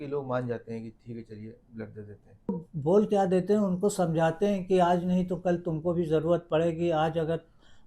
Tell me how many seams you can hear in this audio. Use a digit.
1